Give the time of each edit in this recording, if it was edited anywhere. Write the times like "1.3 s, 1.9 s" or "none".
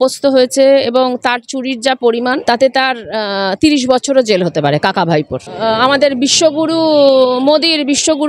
2.4 s, 5.4 s